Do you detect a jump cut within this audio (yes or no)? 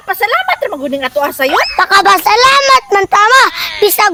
no